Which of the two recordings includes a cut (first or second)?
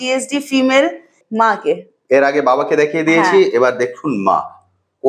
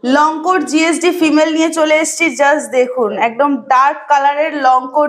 first